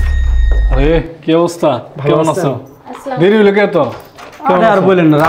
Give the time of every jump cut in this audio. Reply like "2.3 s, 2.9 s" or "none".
none